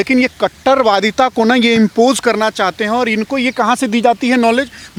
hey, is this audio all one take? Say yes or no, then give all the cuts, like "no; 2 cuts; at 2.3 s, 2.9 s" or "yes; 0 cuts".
yes; 0 cuts